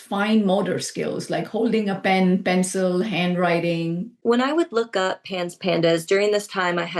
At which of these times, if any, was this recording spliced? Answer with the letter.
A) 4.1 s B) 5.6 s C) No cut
A